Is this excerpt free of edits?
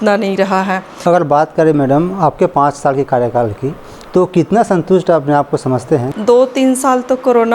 no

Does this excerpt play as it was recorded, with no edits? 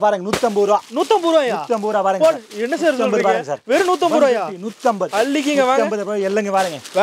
yes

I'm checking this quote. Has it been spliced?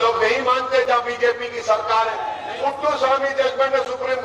yes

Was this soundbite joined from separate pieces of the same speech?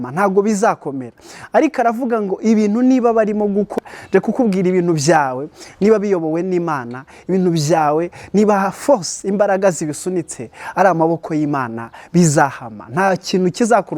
yes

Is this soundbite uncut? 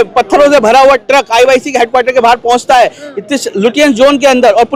yes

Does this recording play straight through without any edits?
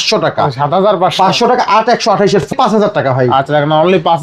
no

